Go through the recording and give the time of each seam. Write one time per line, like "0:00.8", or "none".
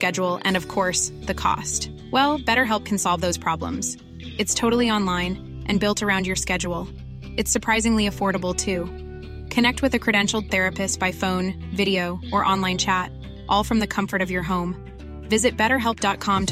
none